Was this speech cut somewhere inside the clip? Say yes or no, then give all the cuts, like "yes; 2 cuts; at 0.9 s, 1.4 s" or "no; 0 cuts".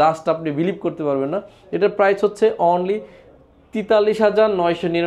no; 0 cuts